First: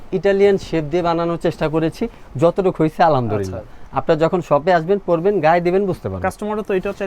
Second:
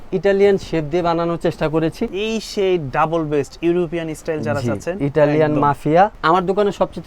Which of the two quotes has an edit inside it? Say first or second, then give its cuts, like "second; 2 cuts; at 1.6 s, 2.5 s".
second; 2 cuts; at 2.1 s, 6.2 s